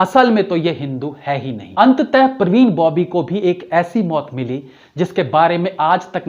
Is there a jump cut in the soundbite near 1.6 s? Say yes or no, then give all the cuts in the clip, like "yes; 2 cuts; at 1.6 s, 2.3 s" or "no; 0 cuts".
yes; 1 cut; at 1.6 s